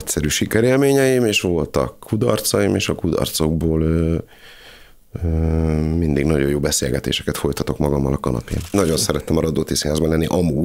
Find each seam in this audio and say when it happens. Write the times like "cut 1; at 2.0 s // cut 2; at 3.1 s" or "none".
cut 1; at 8.7 s